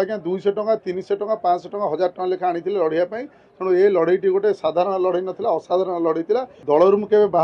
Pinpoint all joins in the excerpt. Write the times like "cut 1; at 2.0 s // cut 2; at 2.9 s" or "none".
cut 1; at 6.5 s